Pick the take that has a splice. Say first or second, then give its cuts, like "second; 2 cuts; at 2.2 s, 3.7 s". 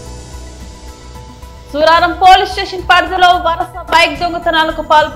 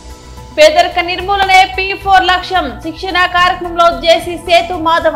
first; 1 cut; at 1.0 s